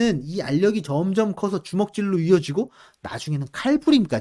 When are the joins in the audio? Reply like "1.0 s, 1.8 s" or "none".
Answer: none